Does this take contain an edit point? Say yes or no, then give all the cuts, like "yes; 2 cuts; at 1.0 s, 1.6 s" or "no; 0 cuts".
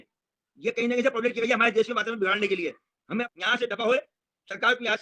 yes; 1 cut; at 3.3 s